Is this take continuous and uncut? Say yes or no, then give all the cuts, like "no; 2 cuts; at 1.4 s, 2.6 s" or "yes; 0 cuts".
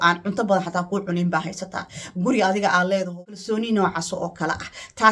no; 1 cut; at 3.3 s